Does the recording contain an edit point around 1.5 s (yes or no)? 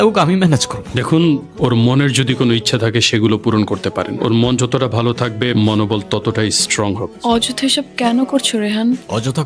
yes